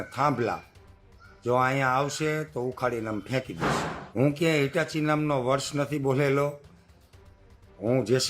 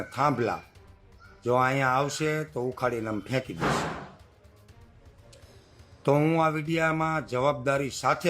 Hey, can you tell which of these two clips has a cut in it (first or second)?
first